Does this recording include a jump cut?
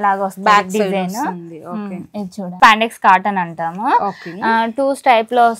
yes; 1 cut; at 2.5 s

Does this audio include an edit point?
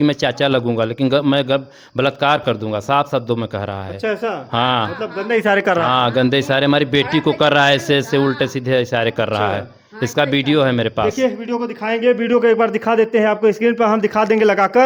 no; 0 cuts

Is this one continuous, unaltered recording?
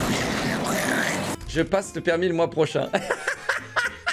no; 1 cut; at 1.4 s

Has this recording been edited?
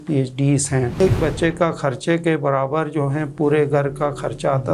yes; 1 cut; at 1.0 s

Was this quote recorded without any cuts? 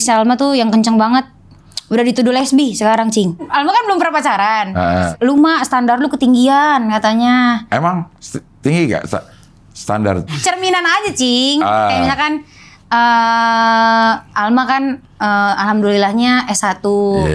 no; 3 cuts; at 3.4 s, 5.1 s, 10.3 s

